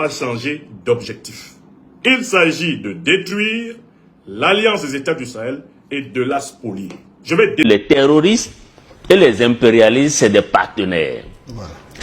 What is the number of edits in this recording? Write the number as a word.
one